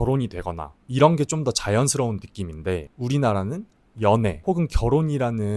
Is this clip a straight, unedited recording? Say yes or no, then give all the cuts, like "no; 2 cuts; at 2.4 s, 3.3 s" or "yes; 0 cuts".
no; 1 cut; at 4.4 s